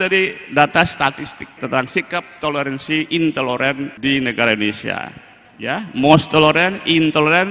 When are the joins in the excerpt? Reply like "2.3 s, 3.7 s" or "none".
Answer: 1.6 s, 3.9 s